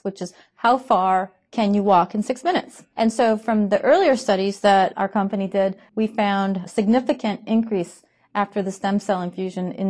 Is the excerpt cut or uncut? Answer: cut